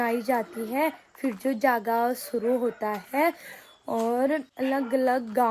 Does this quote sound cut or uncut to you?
uncut